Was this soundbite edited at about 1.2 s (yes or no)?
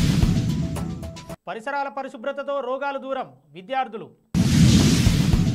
yes